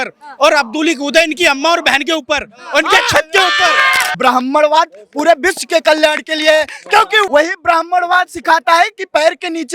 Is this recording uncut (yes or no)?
no